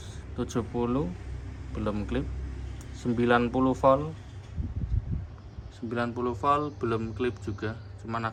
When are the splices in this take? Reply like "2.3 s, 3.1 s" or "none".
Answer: none